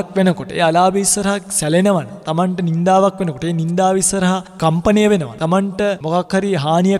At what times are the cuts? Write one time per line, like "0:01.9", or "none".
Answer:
0:02.2
0:05.4